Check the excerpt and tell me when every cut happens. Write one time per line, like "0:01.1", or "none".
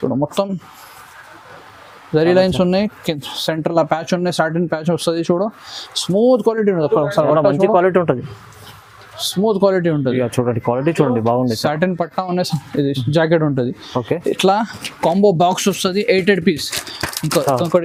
none